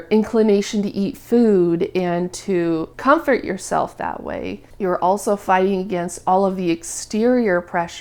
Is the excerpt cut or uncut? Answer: uncut